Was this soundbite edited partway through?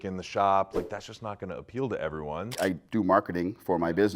yes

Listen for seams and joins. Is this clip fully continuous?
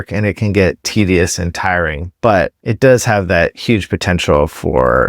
no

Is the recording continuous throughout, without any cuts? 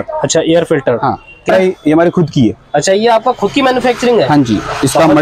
no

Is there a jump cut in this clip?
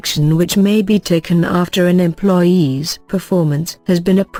no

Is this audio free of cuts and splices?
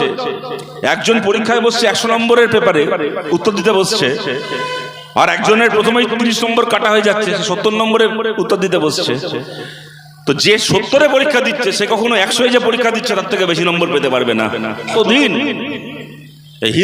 no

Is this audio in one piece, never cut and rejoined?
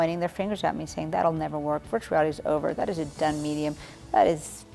yes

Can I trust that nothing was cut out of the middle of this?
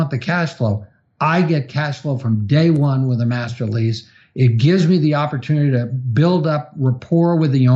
yes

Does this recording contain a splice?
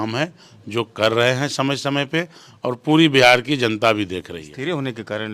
yes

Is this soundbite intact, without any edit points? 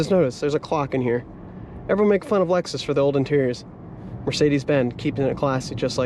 yes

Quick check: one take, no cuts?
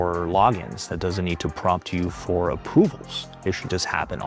yes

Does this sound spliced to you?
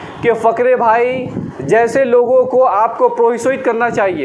no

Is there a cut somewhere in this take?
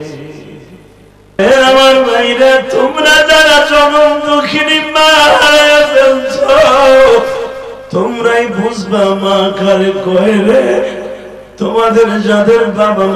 yes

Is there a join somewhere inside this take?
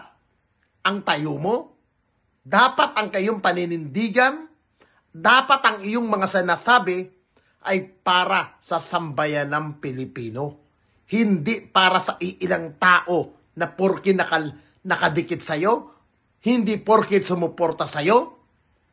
no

